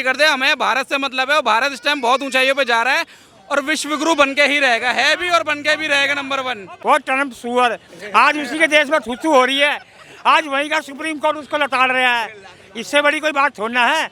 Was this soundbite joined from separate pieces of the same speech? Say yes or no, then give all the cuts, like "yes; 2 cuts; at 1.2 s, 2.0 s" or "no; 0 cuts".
no; 0 cuts